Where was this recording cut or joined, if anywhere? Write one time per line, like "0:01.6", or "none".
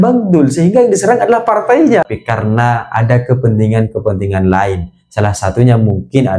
0:02.0